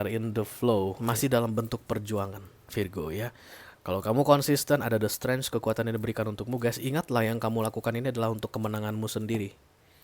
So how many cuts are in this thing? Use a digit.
1